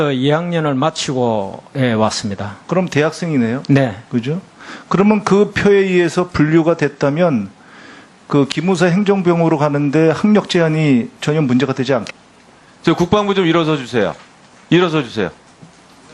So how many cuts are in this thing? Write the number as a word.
zero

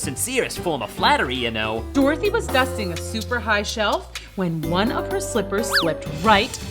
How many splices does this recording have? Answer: one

